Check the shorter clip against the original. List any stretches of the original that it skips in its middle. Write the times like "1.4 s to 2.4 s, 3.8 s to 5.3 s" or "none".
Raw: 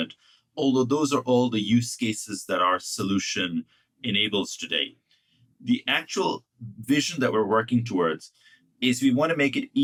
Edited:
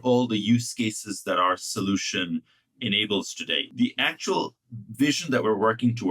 4.9 s to 5.5 s